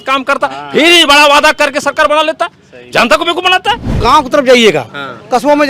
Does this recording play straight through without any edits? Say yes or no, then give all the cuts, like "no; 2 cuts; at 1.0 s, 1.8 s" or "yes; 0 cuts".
no; 1 cut; at 4.0 s